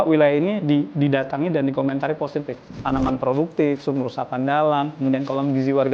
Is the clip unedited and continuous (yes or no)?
no